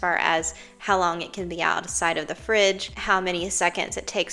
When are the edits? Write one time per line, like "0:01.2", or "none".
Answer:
0:02.9